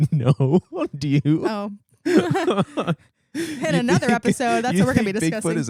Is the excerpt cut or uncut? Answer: uncut